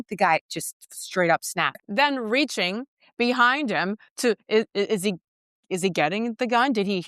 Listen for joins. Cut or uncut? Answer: cut